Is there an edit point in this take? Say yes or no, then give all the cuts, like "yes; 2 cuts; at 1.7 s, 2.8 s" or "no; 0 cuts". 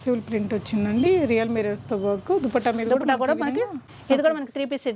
no; 0 cuts